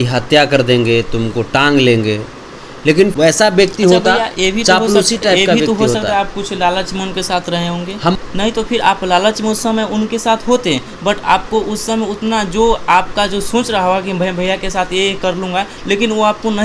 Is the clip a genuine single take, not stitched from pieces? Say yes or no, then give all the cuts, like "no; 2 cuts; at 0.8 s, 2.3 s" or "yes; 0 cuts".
no; 2 cuts; at 3.1 s, 8.1 s